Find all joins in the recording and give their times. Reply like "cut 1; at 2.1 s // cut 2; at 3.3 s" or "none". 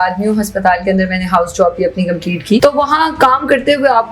cut 1; at 2.6 s